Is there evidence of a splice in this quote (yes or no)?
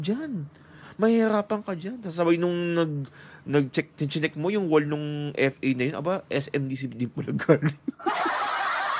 no